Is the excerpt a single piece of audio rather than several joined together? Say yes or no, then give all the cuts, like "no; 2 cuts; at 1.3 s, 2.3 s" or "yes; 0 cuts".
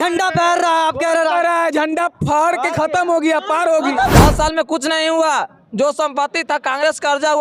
no; 1 cut; at 4.1 s